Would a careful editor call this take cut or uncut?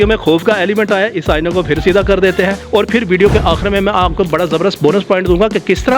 cut